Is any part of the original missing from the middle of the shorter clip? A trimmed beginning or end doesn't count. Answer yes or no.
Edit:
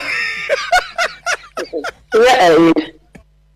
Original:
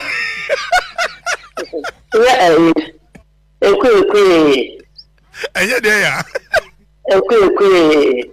no